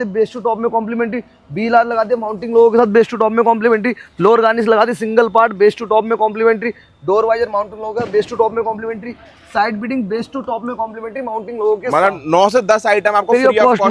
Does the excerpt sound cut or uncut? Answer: uncut